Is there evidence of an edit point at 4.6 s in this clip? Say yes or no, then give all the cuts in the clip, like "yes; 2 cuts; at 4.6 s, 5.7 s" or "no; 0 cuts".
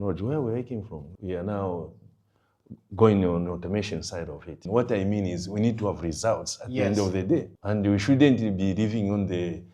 yes; 2 cuts; at 1.0 s, 4.6 s